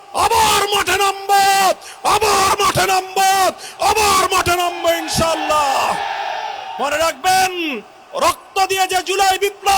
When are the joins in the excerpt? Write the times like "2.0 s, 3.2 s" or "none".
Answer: 6.7 s